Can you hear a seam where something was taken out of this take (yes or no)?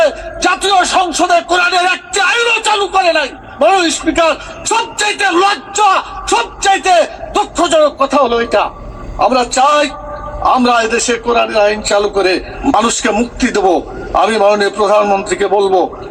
no